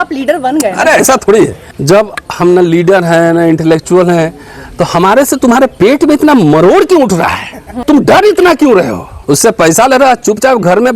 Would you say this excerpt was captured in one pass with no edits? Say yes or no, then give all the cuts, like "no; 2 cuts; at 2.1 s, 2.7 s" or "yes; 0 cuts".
no; 3 cuts; at 1.6 s, 7.8 s, 9.1 s